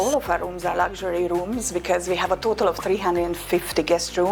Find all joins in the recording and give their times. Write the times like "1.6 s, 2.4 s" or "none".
none